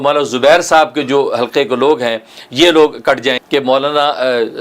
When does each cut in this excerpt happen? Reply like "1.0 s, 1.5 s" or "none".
3.4 s